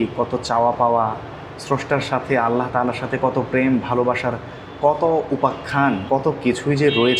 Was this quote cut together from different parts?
yes; 1 cut; at 6.0 s

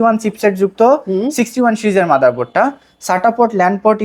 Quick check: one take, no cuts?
yes; 0 cuts

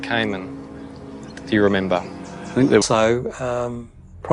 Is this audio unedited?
yes; 0 cuts

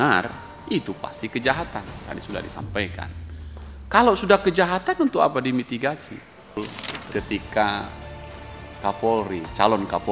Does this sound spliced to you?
yes; 1 cut; at 6.6 s

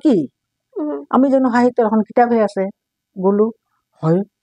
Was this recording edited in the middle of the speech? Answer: no; 0 cuts

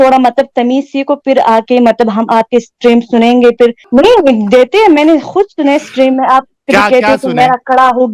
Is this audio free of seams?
no; 1 cut; at 3.8 s

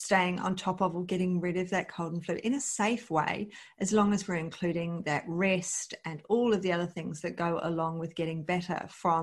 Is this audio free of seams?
yes; 0 cuts

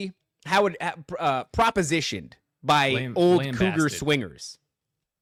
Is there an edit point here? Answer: no; 0 cuts

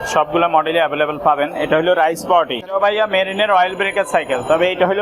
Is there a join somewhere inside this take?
yes; 1 cut; at 2.7 s

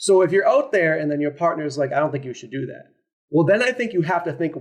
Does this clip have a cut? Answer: no; 0 cuts

